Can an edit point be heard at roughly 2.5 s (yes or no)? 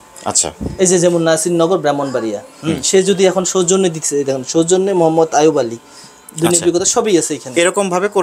no